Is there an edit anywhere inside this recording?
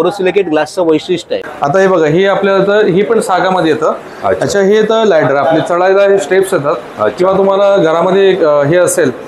yes; 1 cut; at 1.4 s

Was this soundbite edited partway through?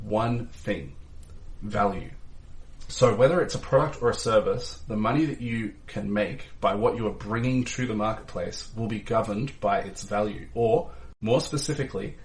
no; 0 cuts

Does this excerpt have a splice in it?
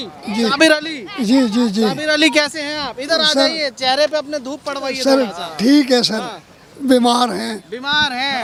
no; 0 cuts

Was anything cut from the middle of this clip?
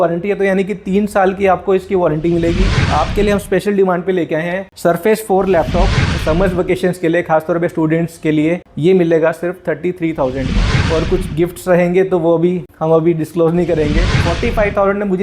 yes; 4 cuts; at 2.8 s, 6.0 s, 10.7 s, 14.1 s

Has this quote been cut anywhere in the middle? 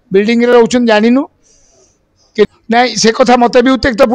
yes; 1 cut; at 2.5 s

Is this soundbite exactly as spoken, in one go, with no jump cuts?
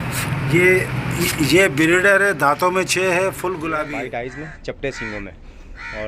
no; 1 cut; at 3.9 s

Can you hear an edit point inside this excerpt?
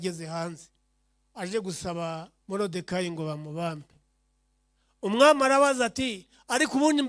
no; 0 cuts

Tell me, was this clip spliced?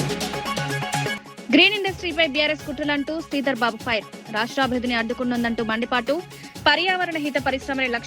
yes; 1 cut; at 1.3 s

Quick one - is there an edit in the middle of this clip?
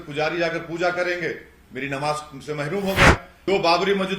yes; 1 cut; at 3.3 s

